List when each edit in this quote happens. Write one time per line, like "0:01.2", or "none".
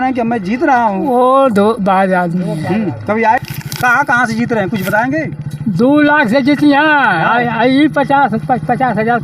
0:03.4